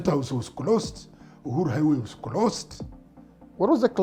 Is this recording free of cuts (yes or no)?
yes